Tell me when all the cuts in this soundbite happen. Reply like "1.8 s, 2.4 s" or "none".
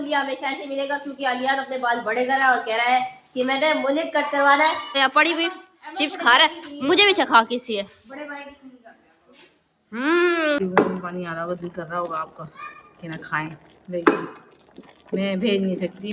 4.9 s, 10.6 s

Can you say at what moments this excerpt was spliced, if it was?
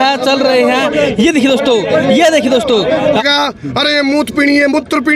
3.2 s

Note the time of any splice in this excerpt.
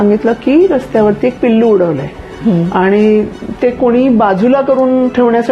none

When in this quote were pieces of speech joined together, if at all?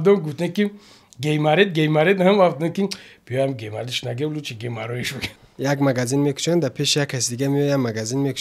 5.2 s

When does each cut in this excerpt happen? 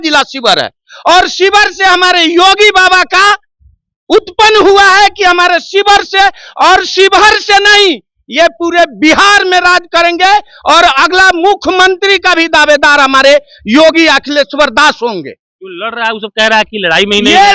none

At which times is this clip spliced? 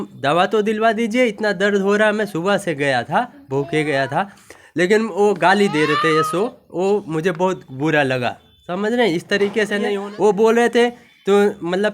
9.9 s

